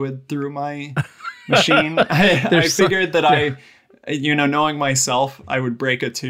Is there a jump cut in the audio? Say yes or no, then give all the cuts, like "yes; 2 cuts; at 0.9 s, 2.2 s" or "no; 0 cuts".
no; 0 cuts